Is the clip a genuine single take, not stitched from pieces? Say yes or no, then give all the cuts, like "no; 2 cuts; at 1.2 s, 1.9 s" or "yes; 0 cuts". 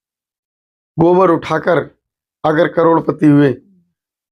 yes; 0 cuts